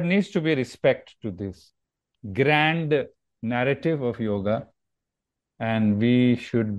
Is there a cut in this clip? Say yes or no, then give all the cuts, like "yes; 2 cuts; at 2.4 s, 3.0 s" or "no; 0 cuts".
no; 0 cuts